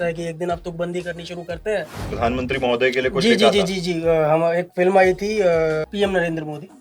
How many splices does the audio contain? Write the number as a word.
two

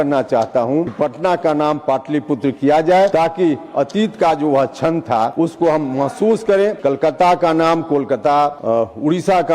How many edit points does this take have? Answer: five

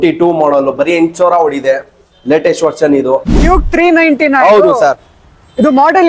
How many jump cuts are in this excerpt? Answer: one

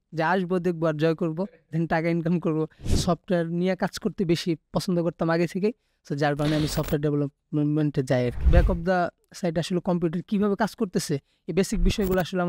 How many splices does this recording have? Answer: two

